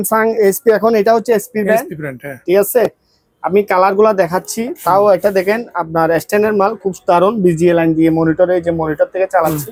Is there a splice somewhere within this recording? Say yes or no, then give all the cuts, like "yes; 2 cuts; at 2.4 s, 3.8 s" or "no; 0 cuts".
no; 0 cuts